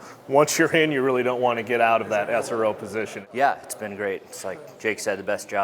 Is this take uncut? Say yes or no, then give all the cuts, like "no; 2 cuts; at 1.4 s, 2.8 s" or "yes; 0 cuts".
no; 1 cut; at 3.2 s